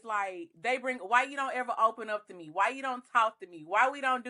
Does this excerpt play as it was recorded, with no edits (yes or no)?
yes